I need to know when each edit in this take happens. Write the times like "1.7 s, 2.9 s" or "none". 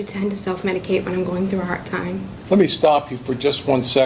2.3 s